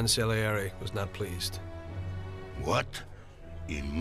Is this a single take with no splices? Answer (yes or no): no